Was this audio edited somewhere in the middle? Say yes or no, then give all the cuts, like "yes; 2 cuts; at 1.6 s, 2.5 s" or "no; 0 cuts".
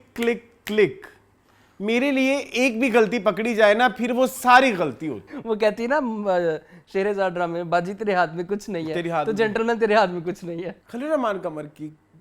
yes; 2 cuts; at 5.3 s, 10.8 s